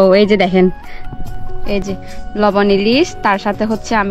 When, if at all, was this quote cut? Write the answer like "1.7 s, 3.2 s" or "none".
2.2 s